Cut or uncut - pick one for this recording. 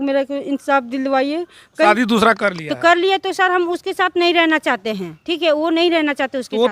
cut